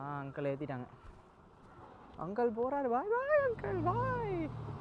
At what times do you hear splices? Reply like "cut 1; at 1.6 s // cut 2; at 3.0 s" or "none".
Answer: none